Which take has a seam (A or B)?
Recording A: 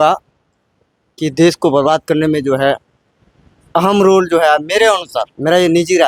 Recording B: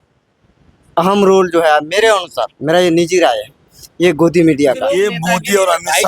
B